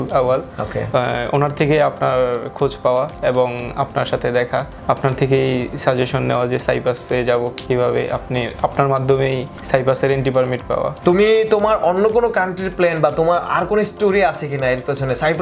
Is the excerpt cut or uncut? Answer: uncut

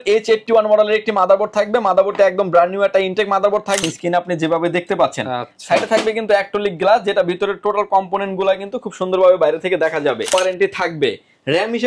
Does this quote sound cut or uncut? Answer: cut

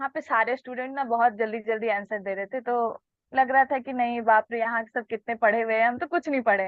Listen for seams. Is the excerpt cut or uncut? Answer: uncut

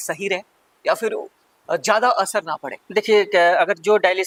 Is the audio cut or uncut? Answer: uncut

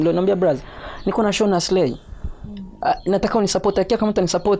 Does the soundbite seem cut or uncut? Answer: uncut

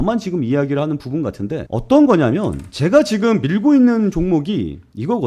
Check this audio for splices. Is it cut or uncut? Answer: uncut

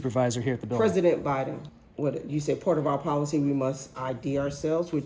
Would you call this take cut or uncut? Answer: cut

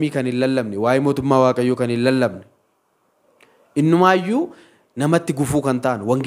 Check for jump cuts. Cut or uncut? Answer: uncut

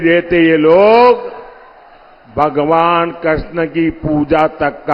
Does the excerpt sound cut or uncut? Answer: uncut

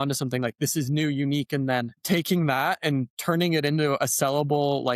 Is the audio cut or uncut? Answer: uncut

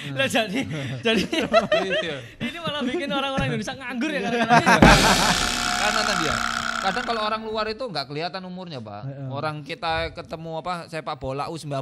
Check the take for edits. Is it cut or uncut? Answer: cut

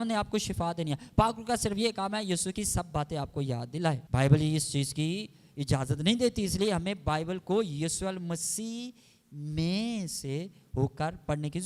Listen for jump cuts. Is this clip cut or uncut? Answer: cut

